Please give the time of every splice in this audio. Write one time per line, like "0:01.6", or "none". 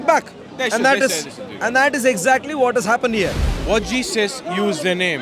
0:03.5